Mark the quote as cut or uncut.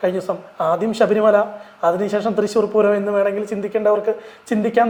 uncut